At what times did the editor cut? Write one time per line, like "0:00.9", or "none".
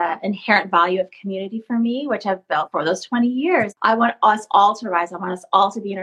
0:02.7
0:03.7